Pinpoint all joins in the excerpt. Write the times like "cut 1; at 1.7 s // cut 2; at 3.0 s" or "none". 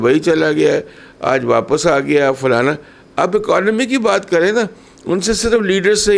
none